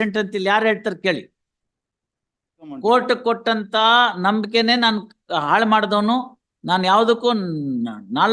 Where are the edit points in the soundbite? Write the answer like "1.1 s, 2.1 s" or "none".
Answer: 2.7 s